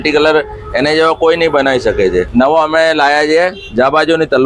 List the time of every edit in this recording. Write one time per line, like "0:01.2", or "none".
0:02.3